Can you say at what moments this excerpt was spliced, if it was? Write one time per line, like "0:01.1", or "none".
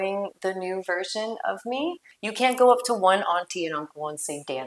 0:02.1